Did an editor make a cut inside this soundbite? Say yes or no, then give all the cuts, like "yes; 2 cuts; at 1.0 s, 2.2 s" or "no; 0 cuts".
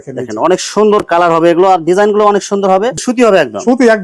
yes; 1 cut; at 3.0 s